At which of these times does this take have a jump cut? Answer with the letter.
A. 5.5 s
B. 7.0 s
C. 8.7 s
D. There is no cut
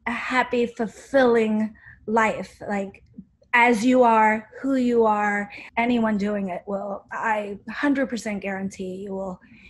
A